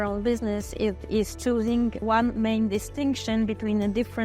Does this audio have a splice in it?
yes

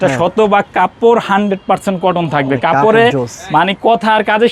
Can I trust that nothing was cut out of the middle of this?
yes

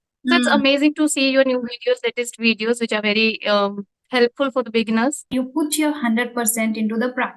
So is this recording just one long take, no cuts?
no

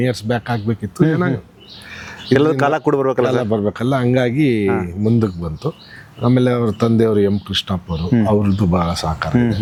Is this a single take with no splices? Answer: yes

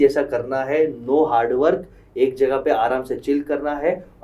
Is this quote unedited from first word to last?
yes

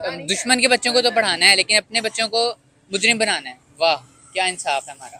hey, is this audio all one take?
yes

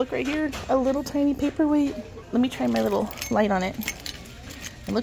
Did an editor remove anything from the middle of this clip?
yes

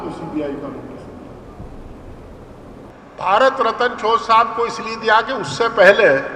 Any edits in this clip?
yes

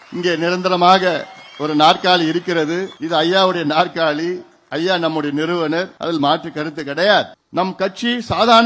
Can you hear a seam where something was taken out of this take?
yes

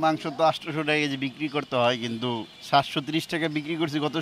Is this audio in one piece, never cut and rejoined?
no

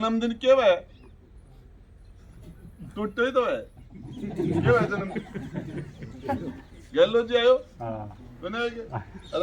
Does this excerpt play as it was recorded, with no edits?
yes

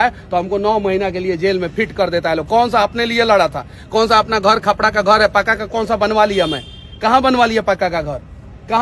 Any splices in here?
no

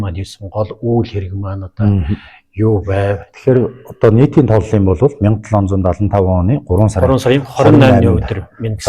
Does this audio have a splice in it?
yes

